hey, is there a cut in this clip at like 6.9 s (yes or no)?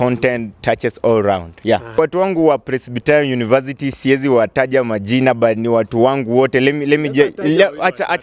no